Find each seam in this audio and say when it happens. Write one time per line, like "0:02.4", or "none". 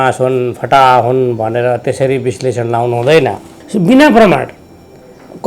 0:03.6